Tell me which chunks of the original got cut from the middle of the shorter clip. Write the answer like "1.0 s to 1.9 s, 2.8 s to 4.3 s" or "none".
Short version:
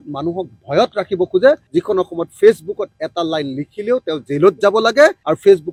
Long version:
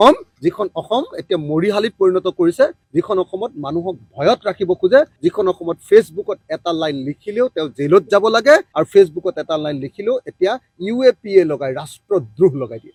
none